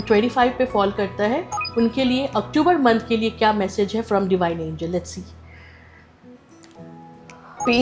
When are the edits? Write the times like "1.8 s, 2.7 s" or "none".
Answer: none